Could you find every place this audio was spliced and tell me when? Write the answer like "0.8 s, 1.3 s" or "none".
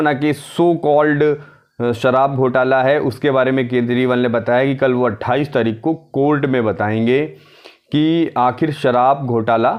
none